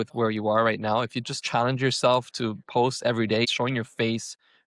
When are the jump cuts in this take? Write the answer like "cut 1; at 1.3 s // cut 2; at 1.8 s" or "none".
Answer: cut 1; at 1.4 s // cut 2; at 3.5 s